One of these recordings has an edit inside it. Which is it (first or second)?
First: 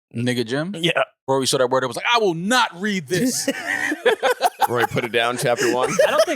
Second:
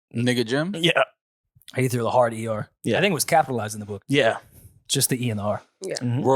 first